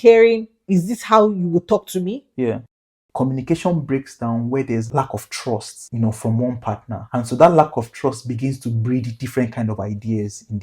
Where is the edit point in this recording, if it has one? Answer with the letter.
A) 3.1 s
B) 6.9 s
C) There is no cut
A